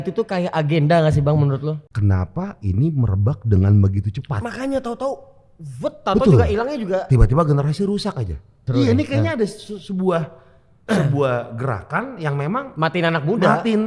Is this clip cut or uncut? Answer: cut